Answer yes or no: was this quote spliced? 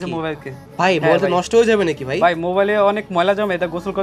no